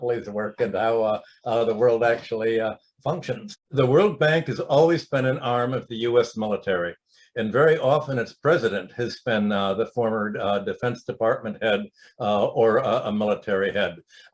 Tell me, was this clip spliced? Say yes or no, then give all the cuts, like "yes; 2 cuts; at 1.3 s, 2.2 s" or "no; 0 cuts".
yes; 1 cut; at 3.5 s